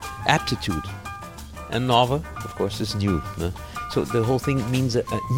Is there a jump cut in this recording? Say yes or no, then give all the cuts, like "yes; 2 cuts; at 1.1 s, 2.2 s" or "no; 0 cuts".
yes; 1 cut; at 4.1 s